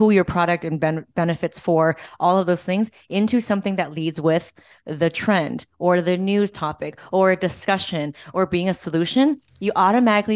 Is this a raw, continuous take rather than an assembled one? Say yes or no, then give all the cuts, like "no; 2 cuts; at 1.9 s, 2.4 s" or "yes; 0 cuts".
yes; 0 cuts